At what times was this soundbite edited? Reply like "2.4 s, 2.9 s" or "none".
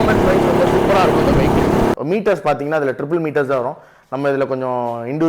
1.9 s